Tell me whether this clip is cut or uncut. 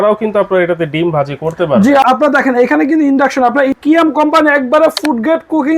cut